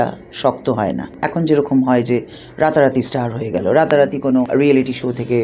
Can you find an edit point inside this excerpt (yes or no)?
yes